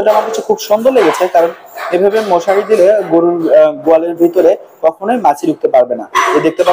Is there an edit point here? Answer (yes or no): no